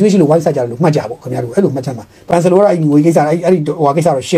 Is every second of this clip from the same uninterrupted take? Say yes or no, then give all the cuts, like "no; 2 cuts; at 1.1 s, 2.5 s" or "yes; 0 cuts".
no; 1 cut; at 2.2 s